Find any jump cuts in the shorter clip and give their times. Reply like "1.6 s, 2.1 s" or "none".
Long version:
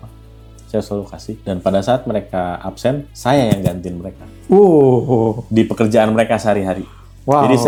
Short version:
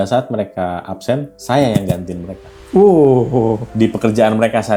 none